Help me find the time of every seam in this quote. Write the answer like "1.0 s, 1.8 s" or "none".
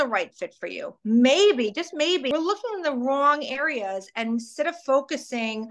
2.3 s